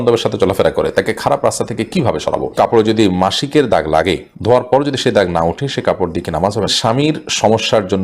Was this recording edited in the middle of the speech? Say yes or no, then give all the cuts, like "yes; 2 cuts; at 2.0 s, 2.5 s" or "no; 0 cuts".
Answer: yes; 2 cuts; at 2.5 s, 6.7 s